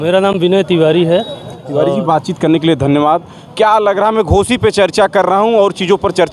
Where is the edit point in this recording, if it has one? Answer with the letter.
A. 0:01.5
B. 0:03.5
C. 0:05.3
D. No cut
D